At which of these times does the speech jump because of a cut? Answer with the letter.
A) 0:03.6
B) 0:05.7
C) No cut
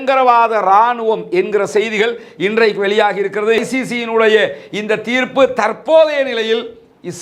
A